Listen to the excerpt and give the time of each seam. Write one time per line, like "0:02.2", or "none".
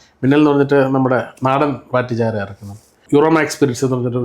0:03.0